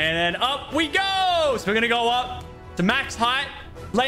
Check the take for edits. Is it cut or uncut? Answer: uncut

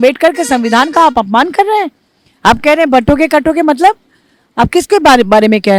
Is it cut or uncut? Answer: uncut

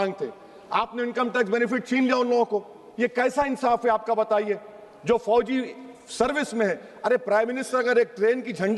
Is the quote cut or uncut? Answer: uncut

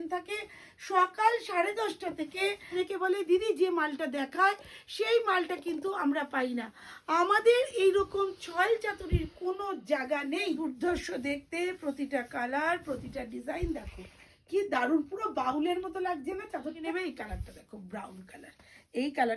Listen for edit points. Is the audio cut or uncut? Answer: cut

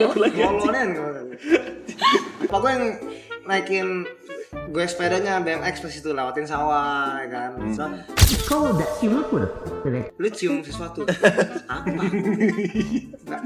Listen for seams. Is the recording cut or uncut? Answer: cut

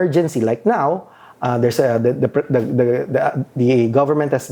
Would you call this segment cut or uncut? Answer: uncut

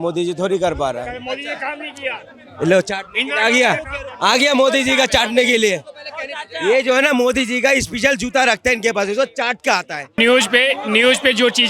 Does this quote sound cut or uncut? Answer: cut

